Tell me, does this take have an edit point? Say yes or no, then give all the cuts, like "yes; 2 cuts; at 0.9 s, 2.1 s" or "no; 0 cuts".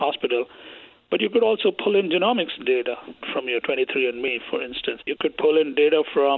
yes; 2 cuts; at 3.1 s, 5.0 s